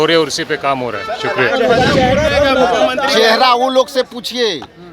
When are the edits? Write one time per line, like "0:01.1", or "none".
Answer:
0:01.5